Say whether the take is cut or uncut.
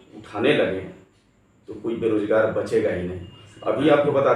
uncut